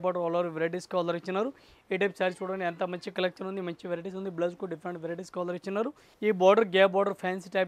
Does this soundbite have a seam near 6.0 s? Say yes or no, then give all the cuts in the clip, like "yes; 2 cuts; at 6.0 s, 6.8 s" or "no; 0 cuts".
yes; 1 cut; at 6.0 s